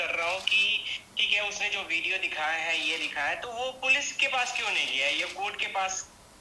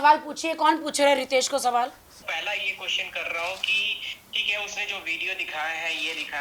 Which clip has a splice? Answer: second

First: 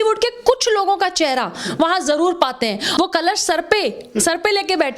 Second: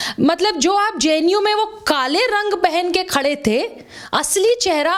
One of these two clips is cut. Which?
first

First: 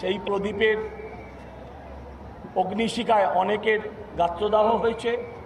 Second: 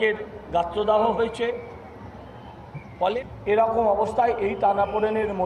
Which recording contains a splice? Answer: second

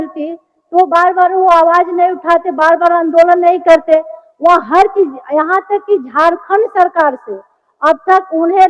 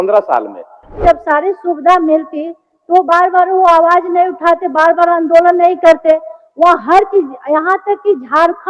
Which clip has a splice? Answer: second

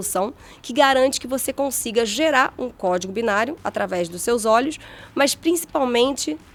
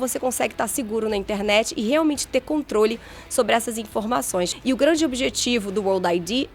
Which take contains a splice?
second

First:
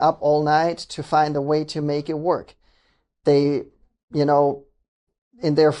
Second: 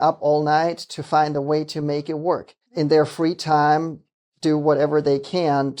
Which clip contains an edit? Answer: second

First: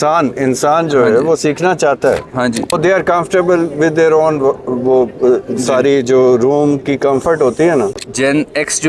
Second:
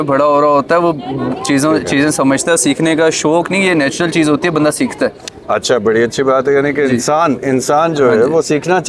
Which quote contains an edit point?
first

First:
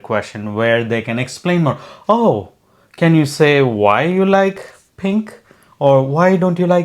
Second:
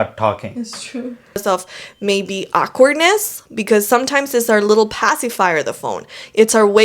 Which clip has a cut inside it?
second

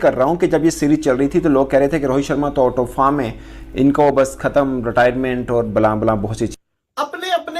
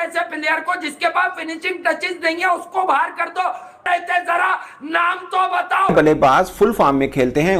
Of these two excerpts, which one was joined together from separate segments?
second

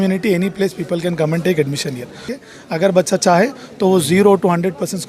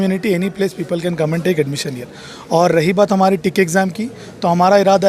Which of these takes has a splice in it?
first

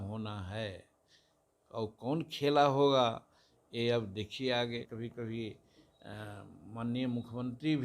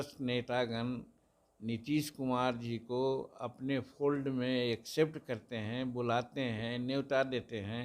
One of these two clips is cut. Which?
first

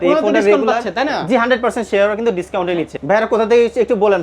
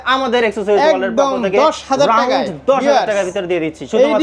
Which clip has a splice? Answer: first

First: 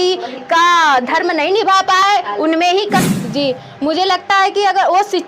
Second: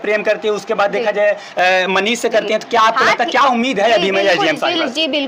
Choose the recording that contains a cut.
first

